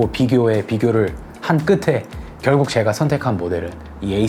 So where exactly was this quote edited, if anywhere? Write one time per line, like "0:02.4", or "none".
none